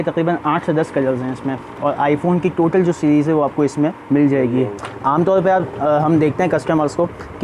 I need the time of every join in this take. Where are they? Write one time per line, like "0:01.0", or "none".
0:01.8
0:04.0
0:04.8